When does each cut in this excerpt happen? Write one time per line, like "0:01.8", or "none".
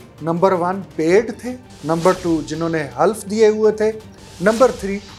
0:01.7